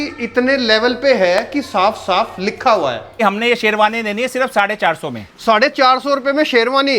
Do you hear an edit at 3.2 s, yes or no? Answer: yes